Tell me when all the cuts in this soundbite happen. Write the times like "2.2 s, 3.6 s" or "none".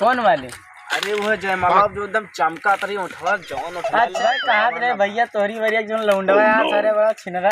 4.2 s